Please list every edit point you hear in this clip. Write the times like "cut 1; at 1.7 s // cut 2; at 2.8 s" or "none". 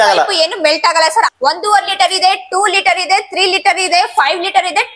cut 1; at 1.3 s

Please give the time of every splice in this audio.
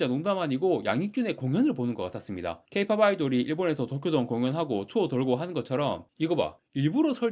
cut 1; at 6.1 s

